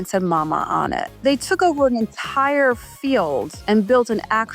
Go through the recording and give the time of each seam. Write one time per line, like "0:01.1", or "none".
0:01.1
0:03.5